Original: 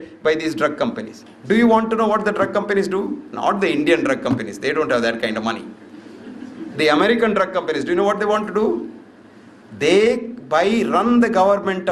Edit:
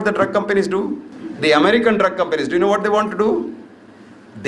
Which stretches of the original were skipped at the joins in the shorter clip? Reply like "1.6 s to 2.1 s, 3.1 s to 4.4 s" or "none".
3.3 s to 6.4 s